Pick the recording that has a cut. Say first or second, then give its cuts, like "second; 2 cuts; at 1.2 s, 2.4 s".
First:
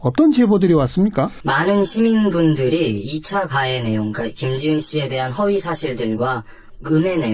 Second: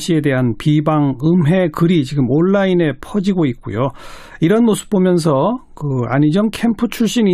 first; 1 cut; at 0.9 s